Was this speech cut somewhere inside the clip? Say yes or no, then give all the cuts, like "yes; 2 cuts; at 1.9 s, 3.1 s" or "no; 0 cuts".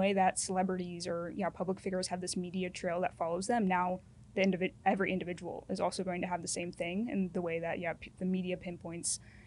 no; 0 cuts